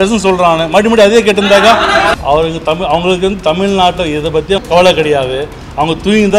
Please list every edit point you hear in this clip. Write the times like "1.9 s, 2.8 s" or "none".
2.1 s, 4.6 s